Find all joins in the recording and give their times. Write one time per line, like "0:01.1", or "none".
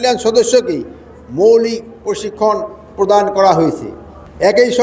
none